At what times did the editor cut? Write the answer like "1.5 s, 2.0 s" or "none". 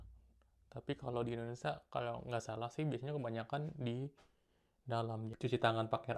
5.2 s